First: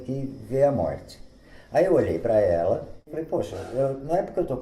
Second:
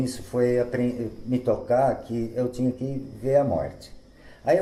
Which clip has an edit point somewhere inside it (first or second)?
first